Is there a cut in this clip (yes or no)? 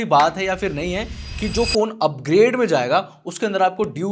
no